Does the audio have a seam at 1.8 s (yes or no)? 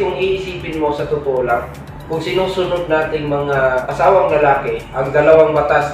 no